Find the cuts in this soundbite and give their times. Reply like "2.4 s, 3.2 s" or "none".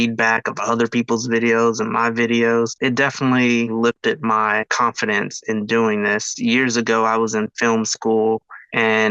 2.7 s, 4.7 s, 6.3 s